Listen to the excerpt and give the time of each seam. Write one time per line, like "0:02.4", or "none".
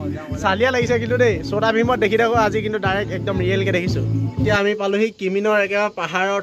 0:04.4